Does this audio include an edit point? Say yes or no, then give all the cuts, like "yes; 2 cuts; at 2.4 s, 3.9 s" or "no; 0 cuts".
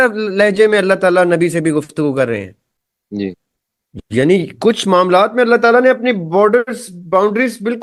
no; 0 cuts